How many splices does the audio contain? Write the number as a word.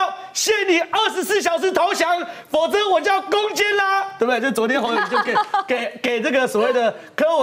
zero